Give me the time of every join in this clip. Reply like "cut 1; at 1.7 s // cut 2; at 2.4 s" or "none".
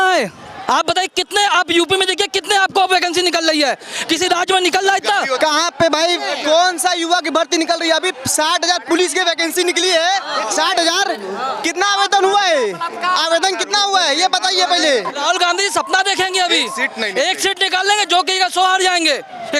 cut 1; at 5.4 s // cut 2; at 15.2 s